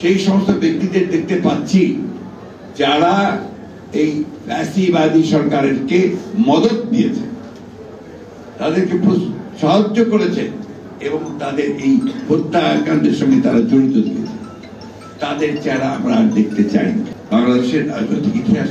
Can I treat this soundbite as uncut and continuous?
no; 1 cut; at 17.1 s

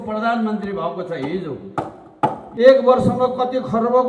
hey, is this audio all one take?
no; 1 cut; at 2.4 s

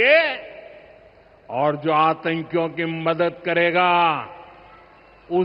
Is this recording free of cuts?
yes; 0 cuts

